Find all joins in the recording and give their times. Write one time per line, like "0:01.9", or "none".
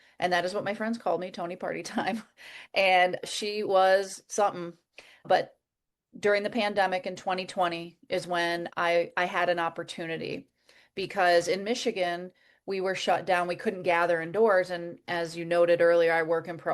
0:03.2
0:05.2
0:15.0